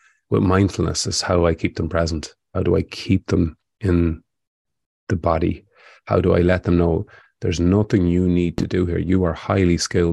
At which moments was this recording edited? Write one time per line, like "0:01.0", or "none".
none